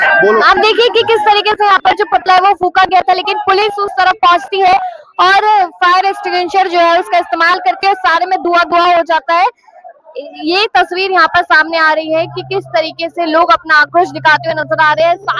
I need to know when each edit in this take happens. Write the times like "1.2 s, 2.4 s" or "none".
none